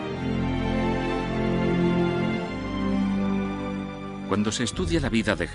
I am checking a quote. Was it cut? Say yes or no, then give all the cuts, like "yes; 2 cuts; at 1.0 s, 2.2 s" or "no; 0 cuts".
yes; 1 cut; at 1.4 s